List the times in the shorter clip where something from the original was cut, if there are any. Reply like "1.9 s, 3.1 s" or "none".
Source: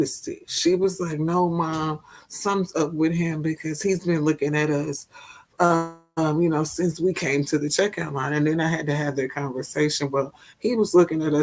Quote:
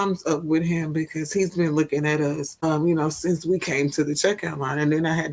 2.5 s